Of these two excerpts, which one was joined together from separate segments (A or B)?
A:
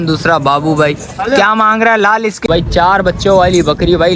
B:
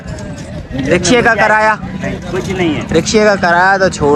A